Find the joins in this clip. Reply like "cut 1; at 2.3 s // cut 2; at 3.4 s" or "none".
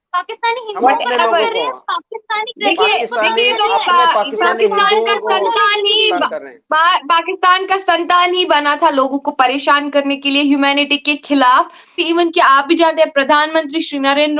cut 1; at 12.0 s